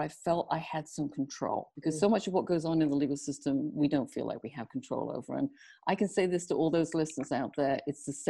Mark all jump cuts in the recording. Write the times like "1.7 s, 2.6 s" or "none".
1.7 s